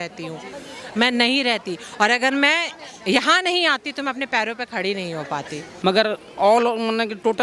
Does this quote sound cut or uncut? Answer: cut